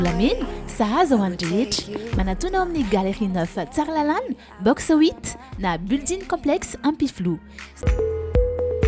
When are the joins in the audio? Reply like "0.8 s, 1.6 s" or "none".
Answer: 7.8 s